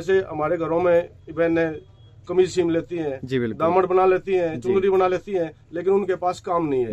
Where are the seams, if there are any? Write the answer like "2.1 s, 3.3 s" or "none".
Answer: none